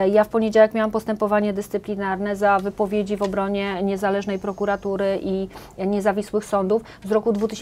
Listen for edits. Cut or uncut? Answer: uncut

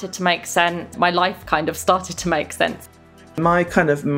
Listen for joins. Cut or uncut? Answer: cut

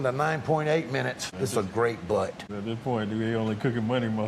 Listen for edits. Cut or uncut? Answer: cut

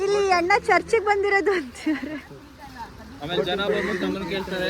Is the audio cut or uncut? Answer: uncut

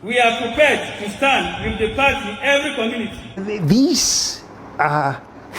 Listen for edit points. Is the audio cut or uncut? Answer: cut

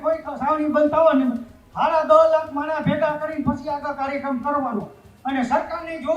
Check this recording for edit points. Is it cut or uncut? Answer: uncut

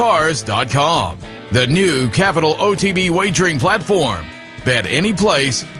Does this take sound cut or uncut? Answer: uncut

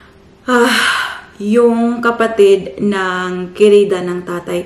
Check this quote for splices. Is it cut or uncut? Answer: uncut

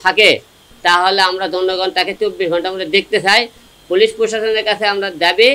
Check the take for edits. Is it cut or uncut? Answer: uncut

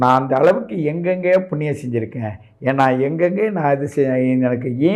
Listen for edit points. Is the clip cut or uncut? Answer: uncut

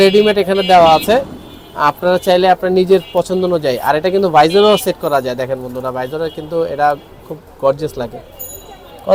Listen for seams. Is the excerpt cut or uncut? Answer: uncut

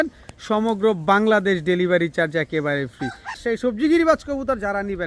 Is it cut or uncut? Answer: cut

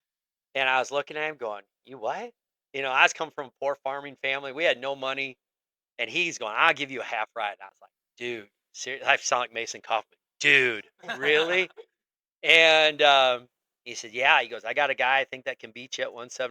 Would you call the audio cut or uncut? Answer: uncut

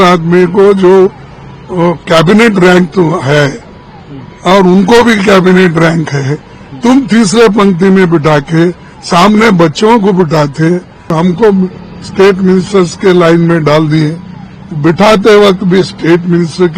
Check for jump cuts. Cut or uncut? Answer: cut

